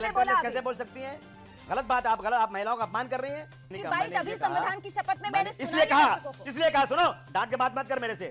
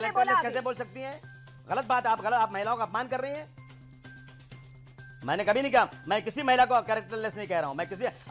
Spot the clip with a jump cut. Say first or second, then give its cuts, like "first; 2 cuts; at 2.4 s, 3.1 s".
first; 1 cut; at 3.8 s